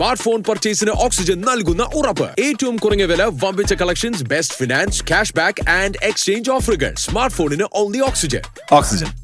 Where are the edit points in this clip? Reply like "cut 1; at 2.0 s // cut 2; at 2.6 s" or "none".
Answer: none